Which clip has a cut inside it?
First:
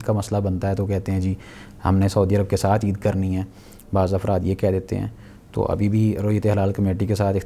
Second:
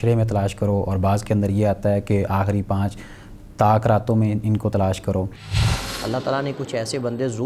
second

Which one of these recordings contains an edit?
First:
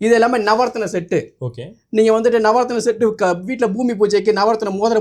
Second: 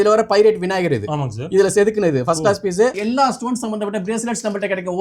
second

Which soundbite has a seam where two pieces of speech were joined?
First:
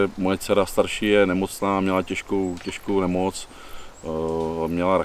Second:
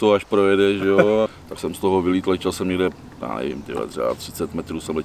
second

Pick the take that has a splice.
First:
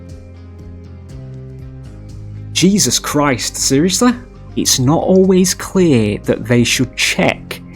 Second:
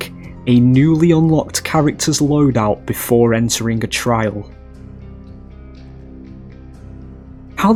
first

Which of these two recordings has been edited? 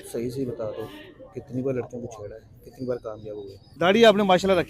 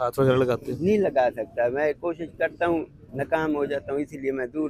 first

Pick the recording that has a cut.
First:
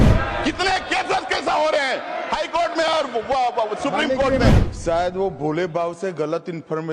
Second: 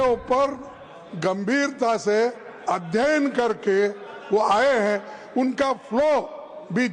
first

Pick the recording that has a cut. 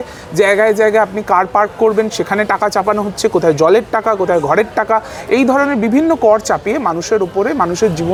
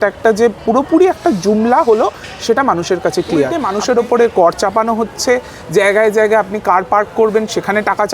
second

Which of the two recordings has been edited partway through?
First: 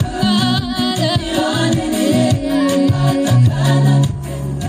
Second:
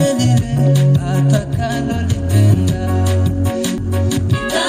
second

